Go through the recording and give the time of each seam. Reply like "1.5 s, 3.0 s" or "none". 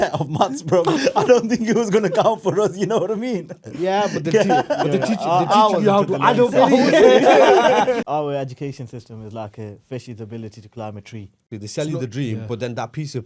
8.0 s, 11.6 s